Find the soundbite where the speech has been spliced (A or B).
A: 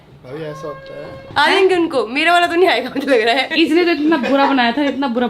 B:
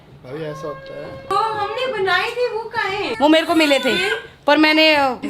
A